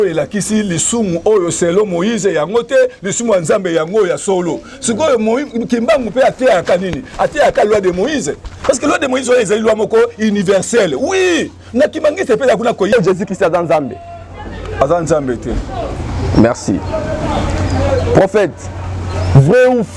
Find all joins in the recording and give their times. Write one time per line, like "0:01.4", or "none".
0:12.9